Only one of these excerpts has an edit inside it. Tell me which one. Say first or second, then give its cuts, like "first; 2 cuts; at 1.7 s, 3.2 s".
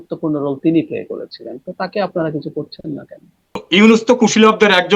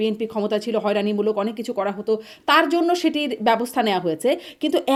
first; 1 cut; at 3.6 s